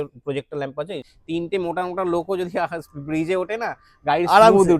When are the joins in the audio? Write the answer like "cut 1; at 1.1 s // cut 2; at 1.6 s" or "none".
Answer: cut 1; at 1.1 s

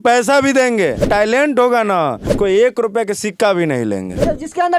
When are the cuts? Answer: cut 1; at 1.0 s // cut 2; at 2.3 s

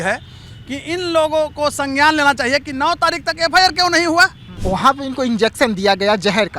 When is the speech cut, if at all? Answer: cut 1; at 4.5 s

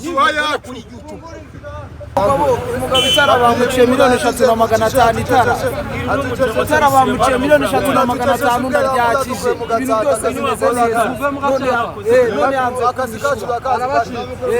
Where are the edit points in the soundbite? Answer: cut 1; at 2.1 s

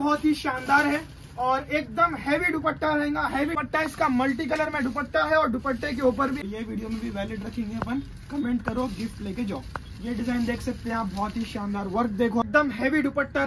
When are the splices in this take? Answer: cut 1; at 3.6 s // cut 2; at 6.4 s // cut 3; at 12.4 s

